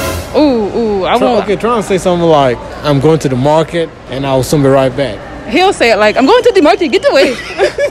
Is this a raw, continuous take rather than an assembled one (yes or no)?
no